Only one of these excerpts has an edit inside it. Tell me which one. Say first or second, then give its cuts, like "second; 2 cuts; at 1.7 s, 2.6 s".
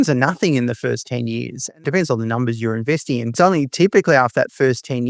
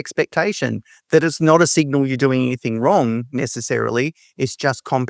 first; 2 cuts; at 1.8 s, 3.3 s